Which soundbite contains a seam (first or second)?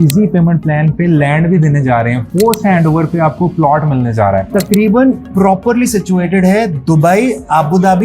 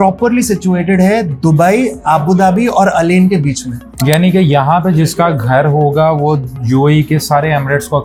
first